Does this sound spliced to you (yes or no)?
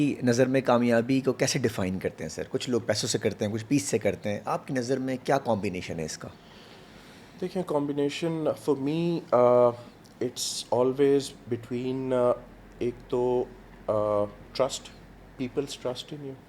no